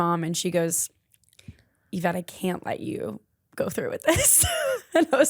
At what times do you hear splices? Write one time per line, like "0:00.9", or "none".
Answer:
none